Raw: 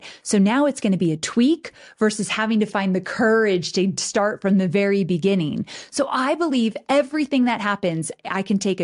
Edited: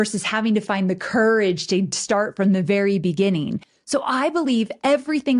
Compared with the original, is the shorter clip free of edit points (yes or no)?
yes